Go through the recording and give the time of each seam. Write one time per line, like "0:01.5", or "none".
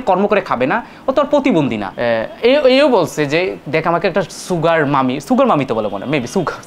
0:01.9